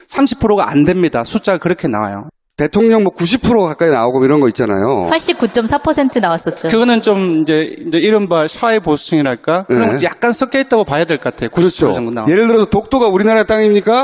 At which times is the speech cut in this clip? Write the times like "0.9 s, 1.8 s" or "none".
5.1 s

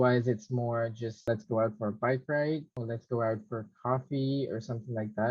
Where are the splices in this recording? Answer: 1.2 s

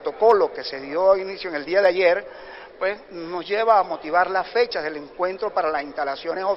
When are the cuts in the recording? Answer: 2.1 s

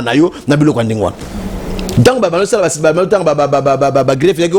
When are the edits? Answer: none

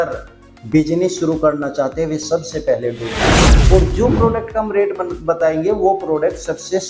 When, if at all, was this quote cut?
3.5 s

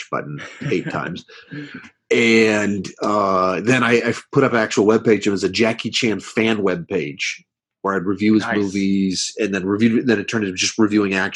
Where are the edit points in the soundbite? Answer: none

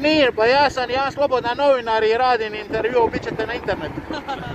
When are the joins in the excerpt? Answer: none

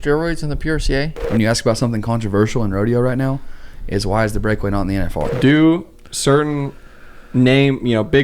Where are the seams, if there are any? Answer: 1.2 s, 5.3 s

